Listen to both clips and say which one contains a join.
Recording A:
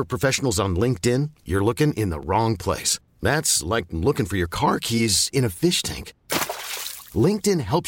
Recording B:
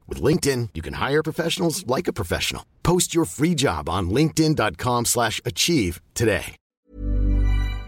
B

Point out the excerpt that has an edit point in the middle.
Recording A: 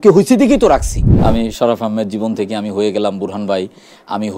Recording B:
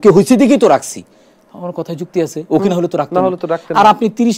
A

